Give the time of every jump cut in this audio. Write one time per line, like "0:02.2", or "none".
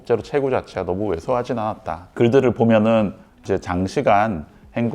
0:03.4